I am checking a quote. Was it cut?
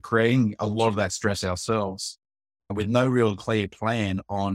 no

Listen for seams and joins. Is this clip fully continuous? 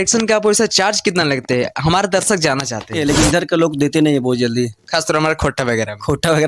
no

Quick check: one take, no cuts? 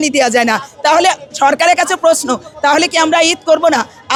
yes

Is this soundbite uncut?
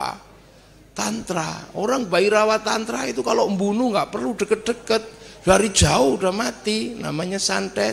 yes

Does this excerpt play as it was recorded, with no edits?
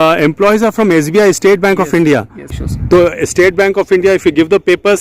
no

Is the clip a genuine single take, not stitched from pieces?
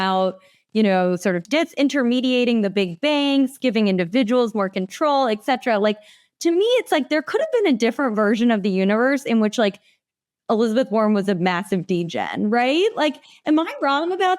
no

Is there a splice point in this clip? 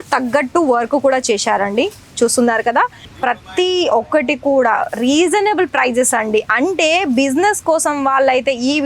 yes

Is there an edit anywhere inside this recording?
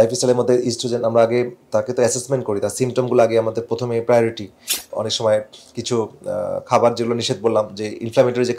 yes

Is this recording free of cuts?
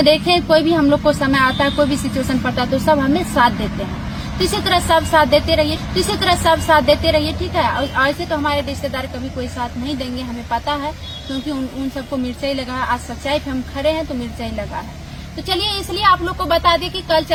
yes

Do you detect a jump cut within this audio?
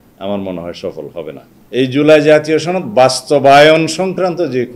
yes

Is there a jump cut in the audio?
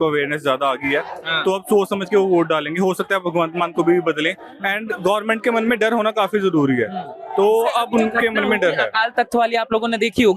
no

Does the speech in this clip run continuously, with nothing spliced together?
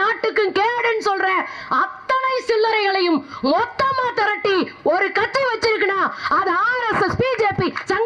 yes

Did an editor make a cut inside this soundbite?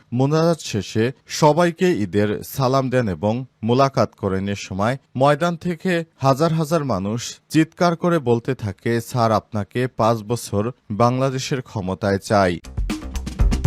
yes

